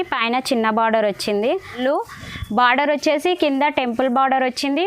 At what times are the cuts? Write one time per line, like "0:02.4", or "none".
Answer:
0:01.8